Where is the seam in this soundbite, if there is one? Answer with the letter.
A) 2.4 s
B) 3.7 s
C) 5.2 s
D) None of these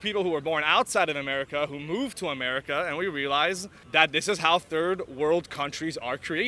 B